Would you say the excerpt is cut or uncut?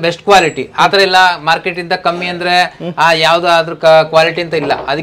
uncut